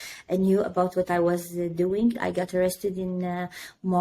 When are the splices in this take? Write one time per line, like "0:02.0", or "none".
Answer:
0:02.2